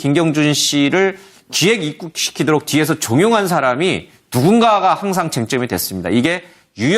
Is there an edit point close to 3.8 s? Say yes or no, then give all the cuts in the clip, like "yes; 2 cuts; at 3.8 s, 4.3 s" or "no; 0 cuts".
no; 1 cut; at 2.3 s